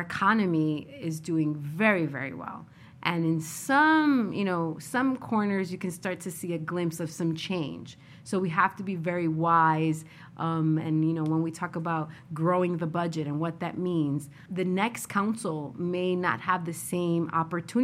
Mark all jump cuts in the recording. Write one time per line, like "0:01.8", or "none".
0:14.4